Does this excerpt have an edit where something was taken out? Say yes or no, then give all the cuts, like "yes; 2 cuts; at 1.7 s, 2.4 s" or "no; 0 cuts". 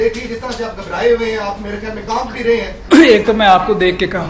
yes; 1 cut; at 2.8 s